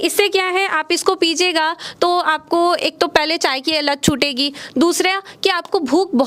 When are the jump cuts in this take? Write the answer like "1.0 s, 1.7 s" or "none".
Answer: none